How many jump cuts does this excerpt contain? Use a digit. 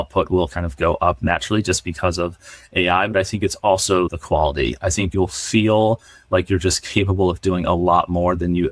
0